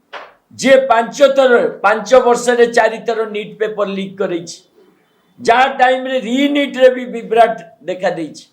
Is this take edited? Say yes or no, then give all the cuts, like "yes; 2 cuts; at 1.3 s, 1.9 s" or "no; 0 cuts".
no; 0 cuts